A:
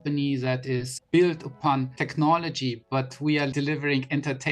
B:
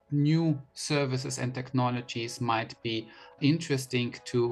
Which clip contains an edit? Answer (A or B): A